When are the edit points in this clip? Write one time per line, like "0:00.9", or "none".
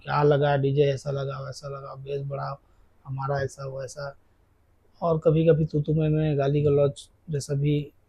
none